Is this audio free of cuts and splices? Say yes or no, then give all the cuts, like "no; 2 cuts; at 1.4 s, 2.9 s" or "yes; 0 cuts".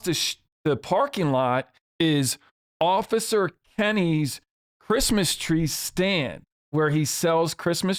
yes; 0 cuts